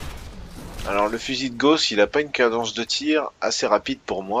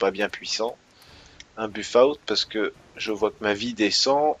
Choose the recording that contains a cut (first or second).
first